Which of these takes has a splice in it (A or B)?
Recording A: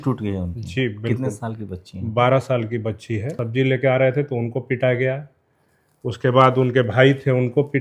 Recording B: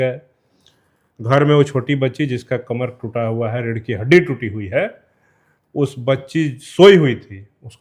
A